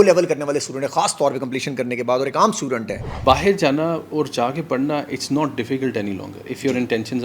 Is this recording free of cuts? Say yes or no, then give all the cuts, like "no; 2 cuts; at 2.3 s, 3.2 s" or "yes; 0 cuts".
no; 1 cut; at 3.1 s